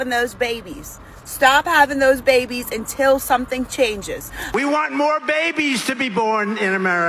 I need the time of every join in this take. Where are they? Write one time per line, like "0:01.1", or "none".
0:04.4